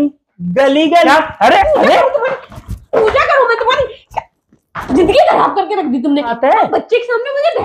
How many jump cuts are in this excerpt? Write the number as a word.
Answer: two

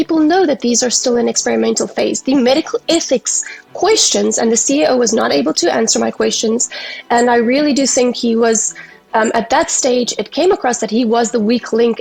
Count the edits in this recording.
zero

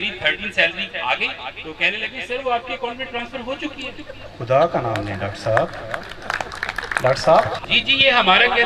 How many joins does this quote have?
one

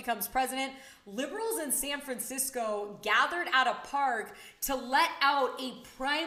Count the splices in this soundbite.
zero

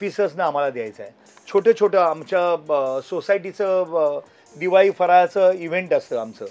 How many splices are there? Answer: zero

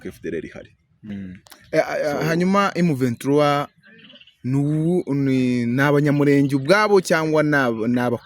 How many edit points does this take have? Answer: one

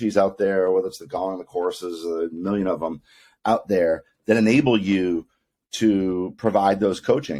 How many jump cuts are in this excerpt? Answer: zero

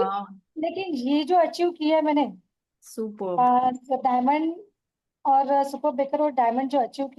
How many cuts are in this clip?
zero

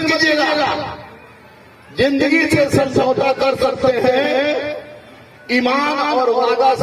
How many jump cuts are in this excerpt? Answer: zero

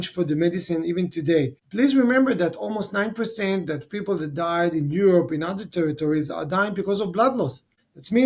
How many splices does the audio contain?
zero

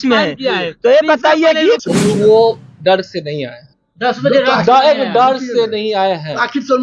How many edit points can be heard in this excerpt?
one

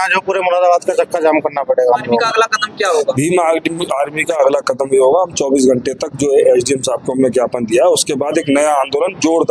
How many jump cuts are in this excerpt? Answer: one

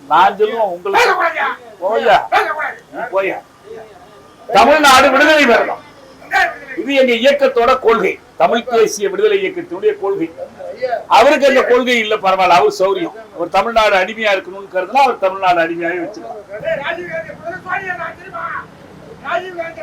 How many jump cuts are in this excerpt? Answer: one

